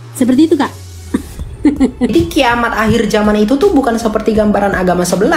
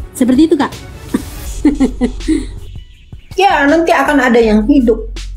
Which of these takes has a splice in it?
first; 1 cut; at 2.1 s

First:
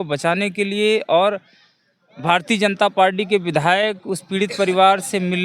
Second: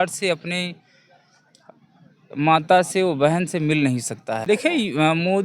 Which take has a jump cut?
second; 1 cut; at 4.4 s

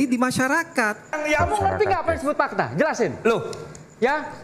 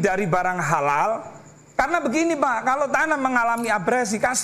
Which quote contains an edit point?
first; 1 cut; at 1.2 s

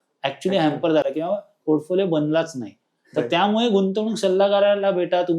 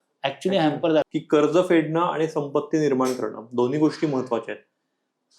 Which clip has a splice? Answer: second; 1 cut; at 1.0 s

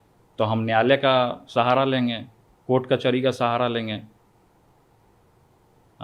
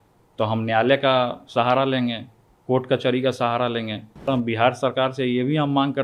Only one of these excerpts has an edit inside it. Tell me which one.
second; 1 cut; at 4.3 s

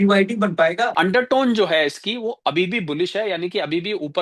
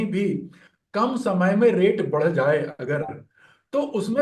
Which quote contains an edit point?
first; 1 cut; at 0.9 s

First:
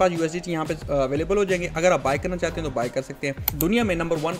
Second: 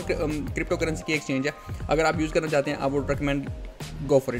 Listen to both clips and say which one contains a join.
first; 1 cut; at 3.4 s

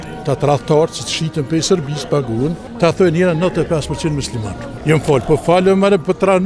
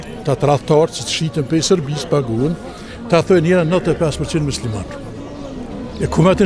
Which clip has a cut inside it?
first; 2 cuts; at 2.6 s, 4.7 s

